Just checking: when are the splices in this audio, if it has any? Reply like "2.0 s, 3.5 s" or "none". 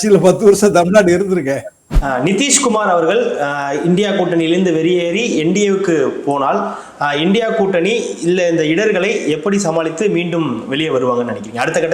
1.8 s